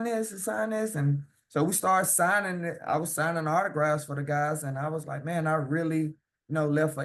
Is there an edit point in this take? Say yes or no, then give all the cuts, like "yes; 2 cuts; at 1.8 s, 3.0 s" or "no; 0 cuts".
no; 0 cuts